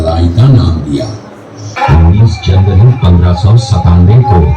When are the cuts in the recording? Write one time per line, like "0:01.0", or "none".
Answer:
0:01.7